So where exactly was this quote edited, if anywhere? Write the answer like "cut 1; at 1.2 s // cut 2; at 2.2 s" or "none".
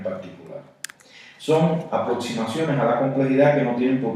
cut 1; at 2.3 s